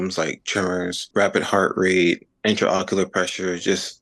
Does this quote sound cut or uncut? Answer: cut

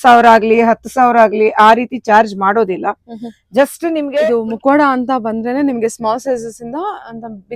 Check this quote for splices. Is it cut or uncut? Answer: cut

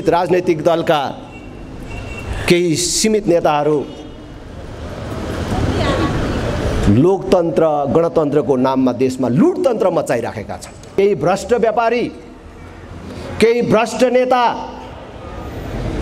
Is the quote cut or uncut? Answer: cut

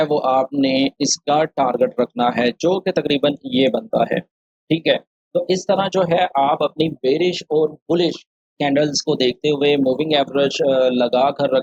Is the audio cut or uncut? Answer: uncut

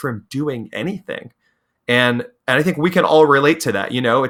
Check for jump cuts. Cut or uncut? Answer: uncut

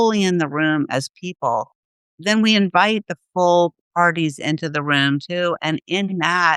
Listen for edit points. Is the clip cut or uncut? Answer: uncut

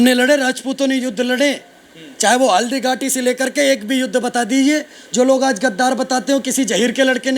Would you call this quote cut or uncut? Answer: uncut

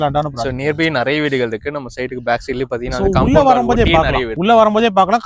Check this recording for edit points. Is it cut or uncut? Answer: cut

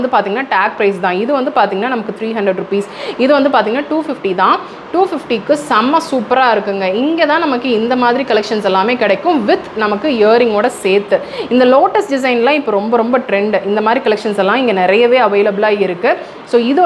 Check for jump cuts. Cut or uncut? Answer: uncut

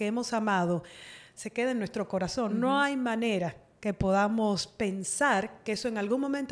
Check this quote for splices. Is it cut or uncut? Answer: uncut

